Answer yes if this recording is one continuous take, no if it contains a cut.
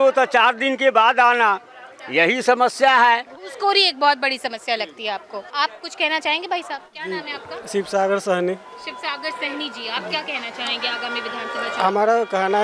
yes